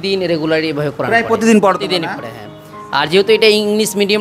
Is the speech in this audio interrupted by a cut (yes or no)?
no